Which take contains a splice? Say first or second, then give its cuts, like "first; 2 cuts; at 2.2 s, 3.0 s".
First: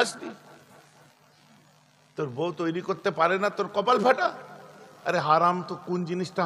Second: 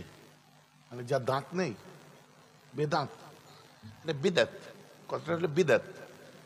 first; 1 cut; at 4.8 s